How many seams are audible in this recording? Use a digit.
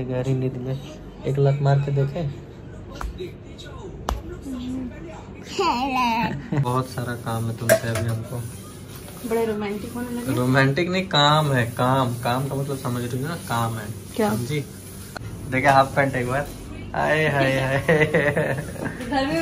2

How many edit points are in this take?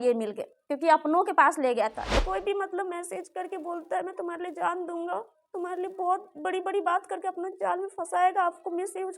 1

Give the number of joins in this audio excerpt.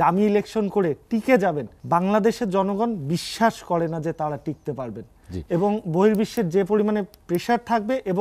1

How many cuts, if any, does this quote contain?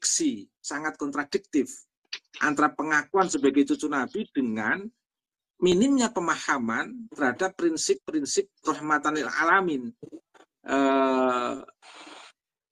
0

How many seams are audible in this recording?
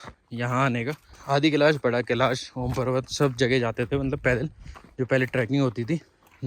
1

